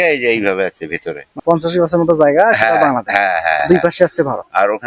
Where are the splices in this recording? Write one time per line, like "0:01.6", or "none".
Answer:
0:01.4